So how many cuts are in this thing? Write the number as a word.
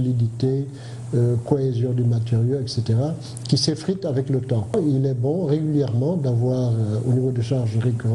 one